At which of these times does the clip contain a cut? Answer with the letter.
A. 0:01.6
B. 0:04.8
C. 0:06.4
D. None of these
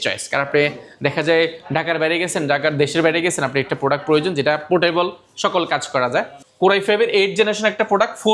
C